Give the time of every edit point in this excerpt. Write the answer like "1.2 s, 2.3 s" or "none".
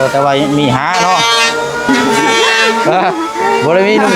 1.9 s